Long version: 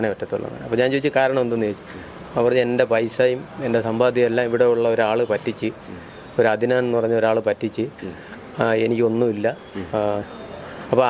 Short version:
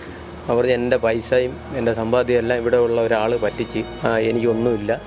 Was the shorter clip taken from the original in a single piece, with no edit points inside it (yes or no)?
no